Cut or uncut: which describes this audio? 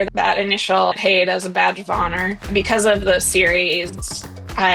cut